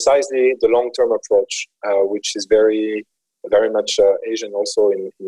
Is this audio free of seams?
yes; 0 cuts

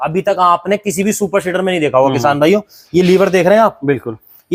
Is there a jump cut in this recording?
no; 0 cuts

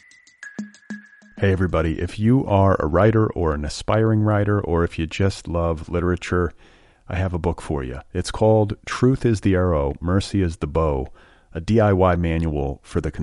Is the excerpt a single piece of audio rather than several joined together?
no; 1 cut; at 0.9 s

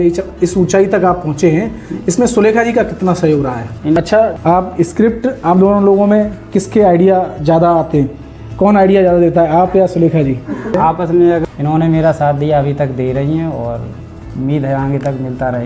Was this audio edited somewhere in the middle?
yes; 3 cuts; at 4.0 s, 10.7 s, 11.4 s

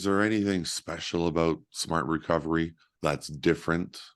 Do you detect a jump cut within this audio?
yes; 1 cut; at 2.8 s

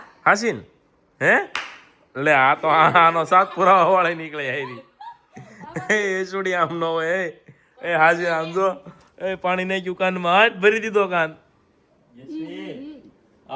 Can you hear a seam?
no; 0 cuts

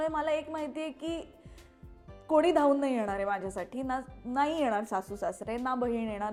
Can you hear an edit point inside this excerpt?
no; 0 cuts

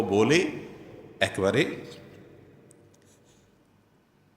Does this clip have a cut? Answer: yes; 1 cut; at 3.0 s

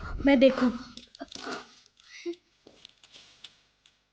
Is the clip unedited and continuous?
yes; 0 cuts

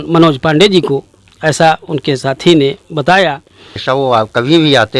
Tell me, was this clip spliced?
yes; 1 cut; at 3.8 s

